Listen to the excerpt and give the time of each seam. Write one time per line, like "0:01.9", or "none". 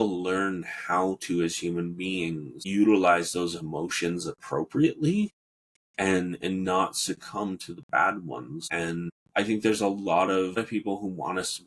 0:02.5
0:08.9
0:10.6